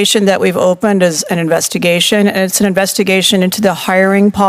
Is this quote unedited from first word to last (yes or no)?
yes